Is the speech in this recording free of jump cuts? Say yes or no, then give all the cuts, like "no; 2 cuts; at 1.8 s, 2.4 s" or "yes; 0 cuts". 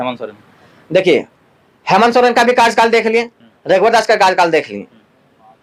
yes; 0 cuts